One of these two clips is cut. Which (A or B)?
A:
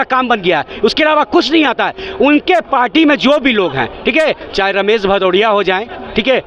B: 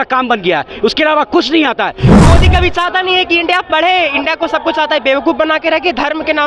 B